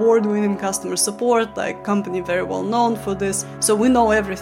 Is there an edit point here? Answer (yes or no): yes